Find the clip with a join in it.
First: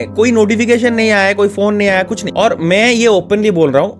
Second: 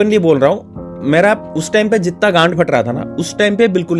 first; 1 cut; at 2.2 s

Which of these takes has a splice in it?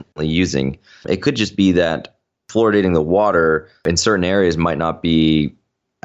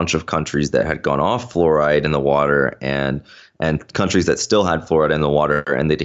first; 3 cuts; at 1.0 s, 2.4 s, 3.9 s

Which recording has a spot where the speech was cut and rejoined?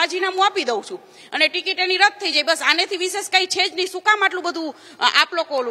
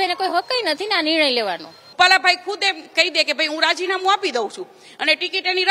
second; 1 cut; at 1.8 s

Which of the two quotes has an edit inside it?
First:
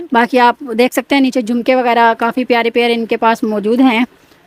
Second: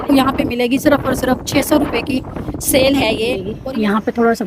second; 1 cut; at 3.5 s

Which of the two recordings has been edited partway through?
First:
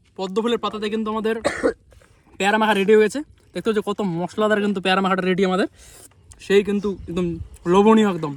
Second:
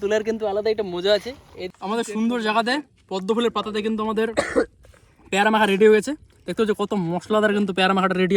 second; 1 cut; at 1.6 s

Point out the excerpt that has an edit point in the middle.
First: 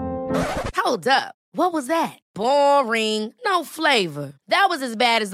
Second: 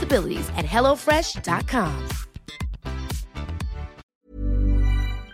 second; 1 cut; at 4.0 s

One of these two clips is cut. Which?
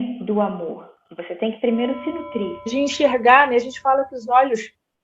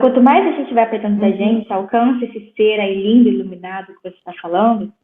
first; 1 cut; at 2.7 s

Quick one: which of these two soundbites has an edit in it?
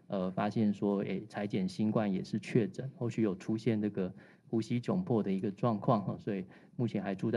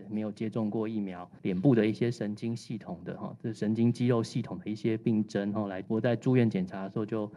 second; 2 cuts; at 1.3 s, 5.8 s

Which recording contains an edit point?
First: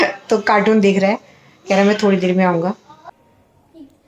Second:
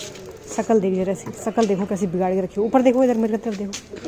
first; 1 cut; at 2.9 s

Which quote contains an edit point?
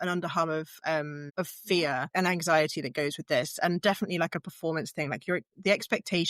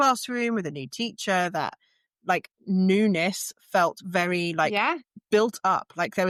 first; 2 cuts; at 1.2 s, 2.1 s

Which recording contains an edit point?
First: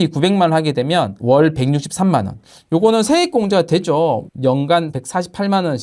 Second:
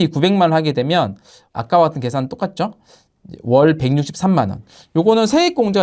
first; 1 cut; at 1.1 s

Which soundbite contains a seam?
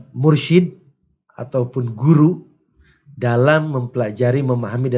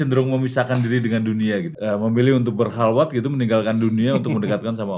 second; 1 cut; at 1.7 s

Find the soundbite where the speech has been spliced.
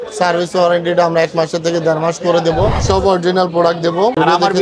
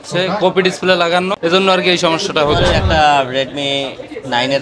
second; 2 cuts; at 1.3 s, 2.6 s

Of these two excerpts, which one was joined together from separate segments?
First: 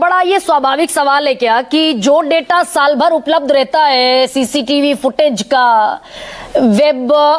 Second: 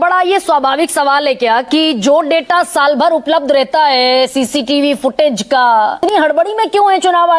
second; 1 cut; at 6.0 s

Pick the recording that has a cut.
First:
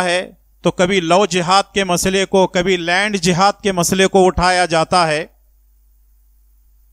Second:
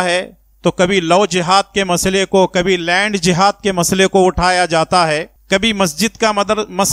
second; 1 cut; at 5.3 s

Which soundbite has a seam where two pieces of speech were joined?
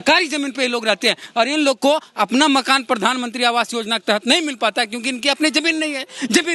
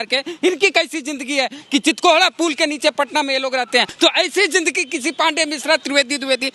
second; 1 cut; at 3.9 s

